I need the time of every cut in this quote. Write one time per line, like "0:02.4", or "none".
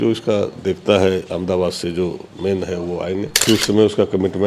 0:03.4